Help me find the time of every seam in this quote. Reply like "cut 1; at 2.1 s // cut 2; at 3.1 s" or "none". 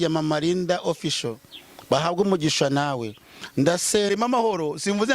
cut 1; at 4.1 s